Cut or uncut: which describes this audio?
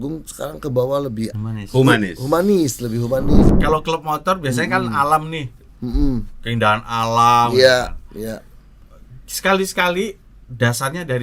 cut